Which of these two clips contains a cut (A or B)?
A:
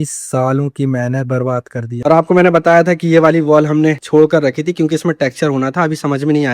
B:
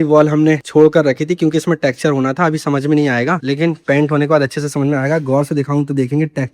A